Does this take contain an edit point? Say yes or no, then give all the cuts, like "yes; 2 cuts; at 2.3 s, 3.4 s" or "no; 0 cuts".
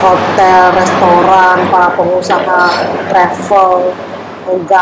no; 0 cuts